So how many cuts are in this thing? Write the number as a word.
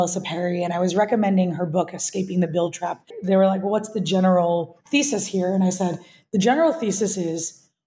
two